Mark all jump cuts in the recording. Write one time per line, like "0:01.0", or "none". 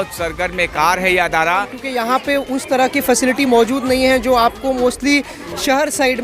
0:01.8